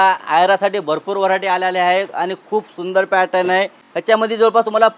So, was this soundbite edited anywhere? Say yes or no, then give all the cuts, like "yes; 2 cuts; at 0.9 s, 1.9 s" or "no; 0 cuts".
yes; 1 cut; at 3.8 s